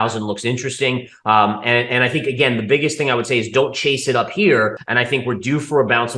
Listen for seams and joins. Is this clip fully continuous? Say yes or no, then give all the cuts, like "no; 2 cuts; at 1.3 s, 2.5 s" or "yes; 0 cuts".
no; 1 cut; at 4.8 s